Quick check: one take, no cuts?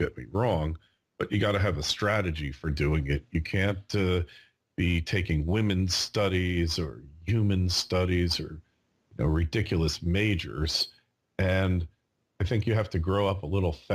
no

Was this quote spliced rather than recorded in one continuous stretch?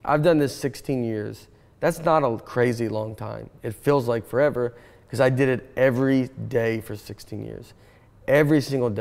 no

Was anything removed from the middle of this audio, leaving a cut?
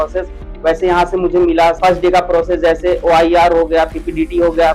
yes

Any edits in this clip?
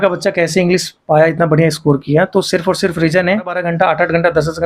yes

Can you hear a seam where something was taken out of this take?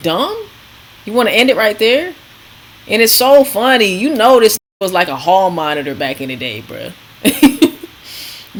no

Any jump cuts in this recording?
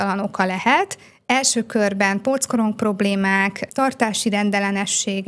no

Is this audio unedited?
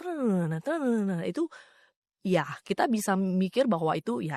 yes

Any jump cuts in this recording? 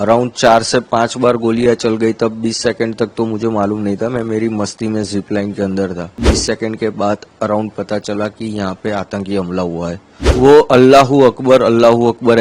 yes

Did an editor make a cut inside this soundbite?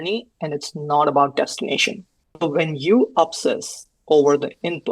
yes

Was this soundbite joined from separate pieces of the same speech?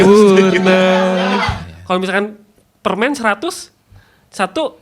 yes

